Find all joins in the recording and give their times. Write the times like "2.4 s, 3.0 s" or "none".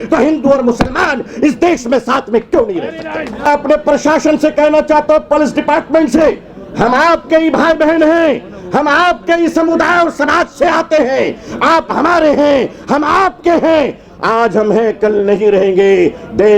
3.5 s